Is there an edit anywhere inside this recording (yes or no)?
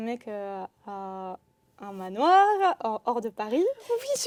no